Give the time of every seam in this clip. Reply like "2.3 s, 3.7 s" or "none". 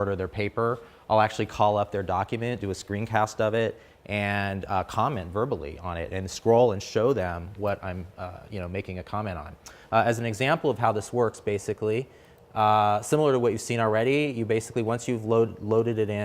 5.7 s